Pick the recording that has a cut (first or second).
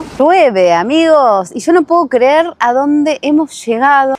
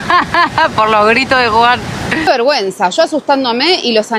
second